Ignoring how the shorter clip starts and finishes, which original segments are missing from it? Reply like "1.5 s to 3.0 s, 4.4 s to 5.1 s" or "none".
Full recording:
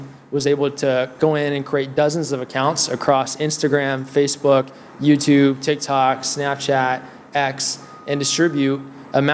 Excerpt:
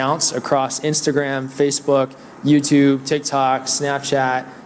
none